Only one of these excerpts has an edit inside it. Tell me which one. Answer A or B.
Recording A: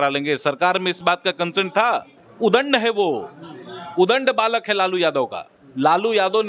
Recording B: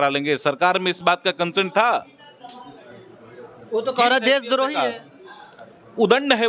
A